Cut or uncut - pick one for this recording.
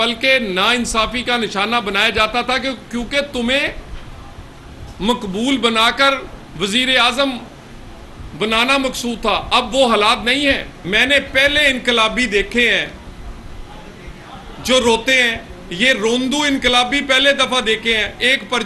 cut